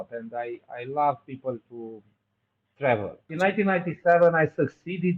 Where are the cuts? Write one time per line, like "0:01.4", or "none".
0:03.3